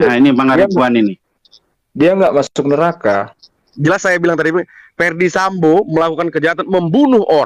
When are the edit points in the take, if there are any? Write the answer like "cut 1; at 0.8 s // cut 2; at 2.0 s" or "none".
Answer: cut 1; at 3.7 s